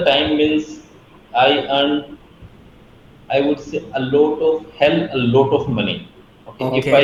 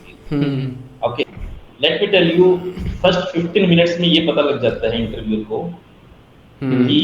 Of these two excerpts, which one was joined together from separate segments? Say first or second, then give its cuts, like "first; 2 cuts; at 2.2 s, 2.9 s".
second; 1 cut; at 1.2 s